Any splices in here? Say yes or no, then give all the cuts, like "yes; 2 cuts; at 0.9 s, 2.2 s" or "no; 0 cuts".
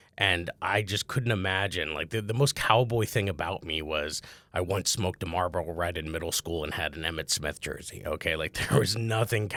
no; 0 cuts